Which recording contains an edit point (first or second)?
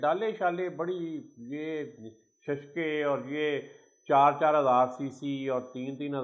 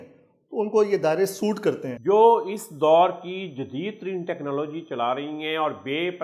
second